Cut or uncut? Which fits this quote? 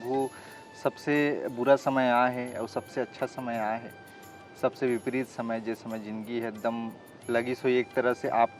uncut